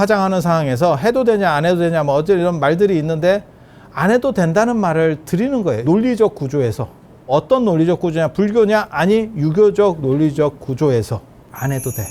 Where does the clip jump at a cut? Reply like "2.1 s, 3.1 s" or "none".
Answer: 5.8 s, 7.3 s